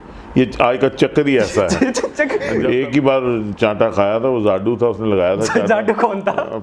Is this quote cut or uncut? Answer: cut